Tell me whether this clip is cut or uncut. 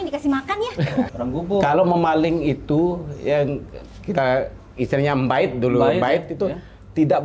cut